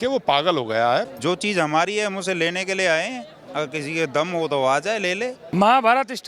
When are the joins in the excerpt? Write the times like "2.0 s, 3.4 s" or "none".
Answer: 1.0 s, 5.5 s